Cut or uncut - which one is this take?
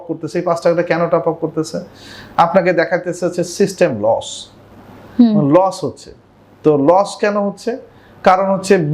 uncut